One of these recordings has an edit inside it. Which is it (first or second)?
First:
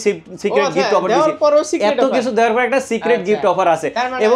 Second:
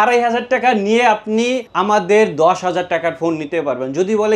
second